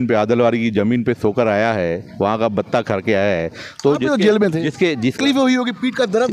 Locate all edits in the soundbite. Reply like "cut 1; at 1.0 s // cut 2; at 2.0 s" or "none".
cut 1; at 5.2 s

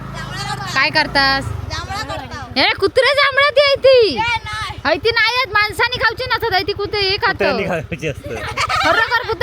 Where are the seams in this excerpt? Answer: none

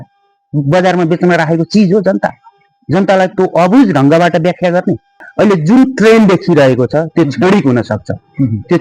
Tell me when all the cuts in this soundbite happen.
cut 1; at 5.3 s

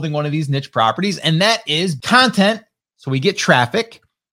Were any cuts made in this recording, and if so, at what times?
cut 1; at 2.0 s

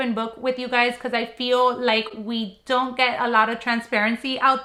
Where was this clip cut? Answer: none

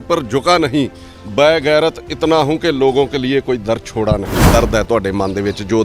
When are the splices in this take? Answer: cut 1; at 4.5 s

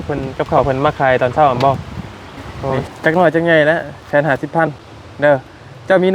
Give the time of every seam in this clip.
cut 1; at 2.8 s

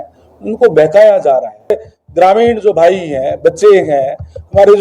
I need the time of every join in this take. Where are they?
cut 1; at 1.9 s

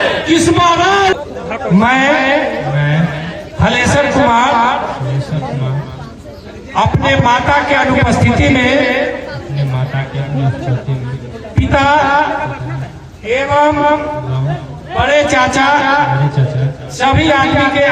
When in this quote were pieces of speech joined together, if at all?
cut 1; at 1.1 s

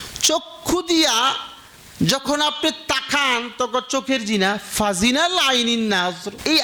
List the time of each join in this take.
none

